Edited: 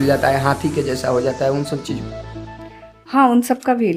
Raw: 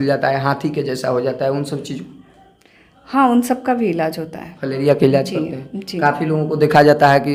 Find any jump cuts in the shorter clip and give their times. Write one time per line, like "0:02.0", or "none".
none